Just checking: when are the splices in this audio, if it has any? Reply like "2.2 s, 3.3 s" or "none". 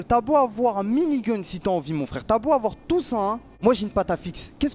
3.5 s